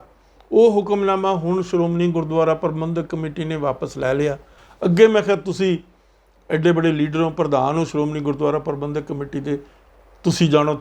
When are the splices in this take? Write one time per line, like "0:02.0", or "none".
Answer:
0:04.6